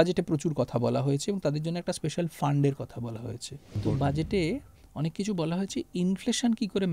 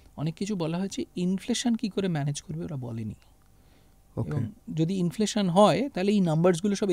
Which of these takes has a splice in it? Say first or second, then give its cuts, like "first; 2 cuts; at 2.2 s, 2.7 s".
first; 1 cut; at 3.8 s